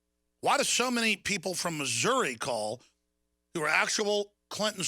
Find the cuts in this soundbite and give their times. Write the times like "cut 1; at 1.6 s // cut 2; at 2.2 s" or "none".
cut 1; at 1.2 s